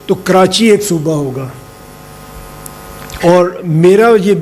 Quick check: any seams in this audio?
no; 0 cuts

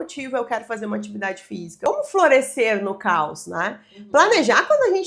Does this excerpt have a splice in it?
yes; 1 cut; at 1.9 s

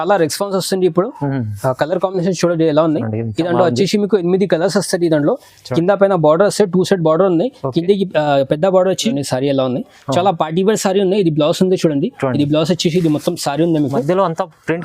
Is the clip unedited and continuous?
no; 1 cut; at 9.1 s

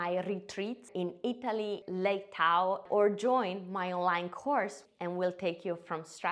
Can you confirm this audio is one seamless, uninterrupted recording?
no; 3 cuts; at 1.8 s, 2.8 s, 4.8 s

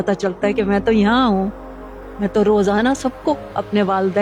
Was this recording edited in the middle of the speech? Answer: no; 0 cuts

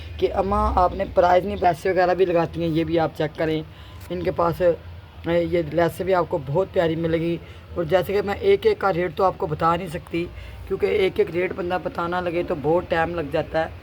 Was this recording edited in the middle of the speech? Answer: yes; 1 cut; at 1.6 s

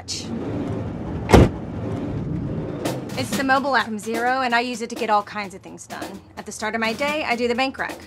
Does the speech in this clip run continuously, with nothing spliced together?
no; 1 cut; at 4.5 s

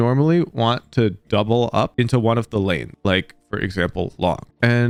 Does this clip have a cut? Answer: no; 0 cuts

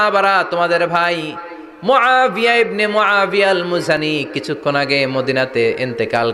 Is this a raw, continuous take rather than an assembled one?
yes; 0 cuts

